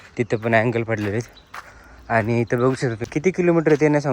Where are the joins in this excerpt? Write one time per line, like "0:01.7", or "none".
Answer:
0:03.1

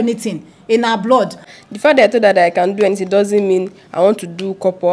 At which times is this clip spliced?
0:01.5

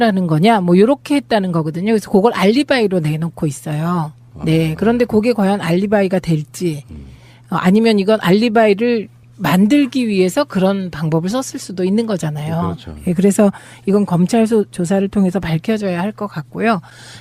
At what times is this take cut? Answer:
0:01.6

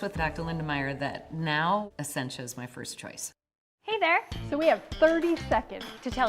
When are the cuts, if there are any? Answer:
0:04.4

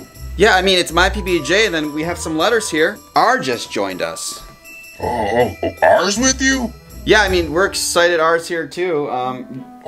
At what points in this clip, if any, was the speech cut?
0:03.0

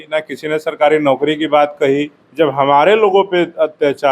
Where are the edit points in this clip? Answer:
0:02.2

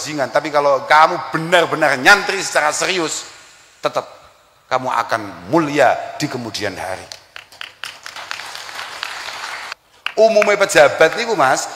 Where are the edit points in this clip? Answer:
0:09.7

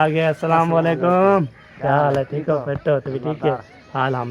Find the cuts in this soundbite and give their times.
none

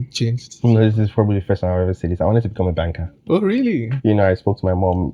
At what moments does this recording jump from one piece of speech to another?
0:03.9

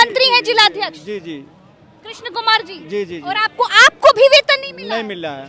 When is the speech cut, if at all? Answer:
none

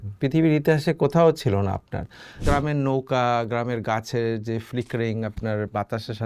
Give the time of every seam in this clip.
0:02.4

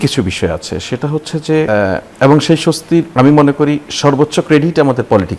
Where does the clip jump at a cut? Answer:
0:01.7
0:03.1

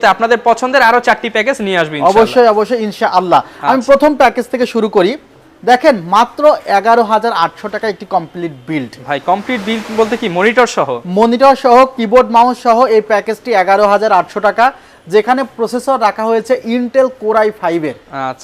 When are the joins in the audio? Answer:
none

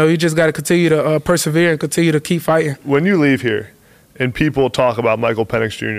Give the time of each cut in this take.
0:02.8

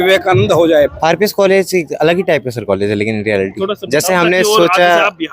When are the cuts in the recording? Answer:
0:01.0

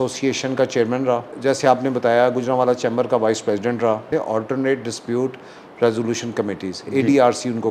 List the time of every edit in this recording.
0:01.3
0:04.1

